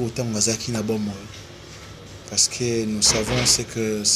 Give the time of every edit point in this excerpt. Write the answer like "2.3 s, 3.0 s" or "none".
none

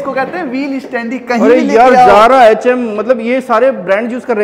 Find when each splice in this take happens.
none

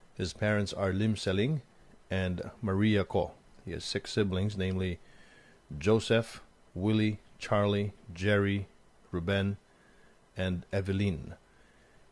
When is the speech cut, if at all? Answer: 1.7 s

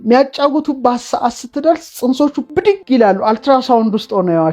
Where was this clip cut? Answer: 2.6 s

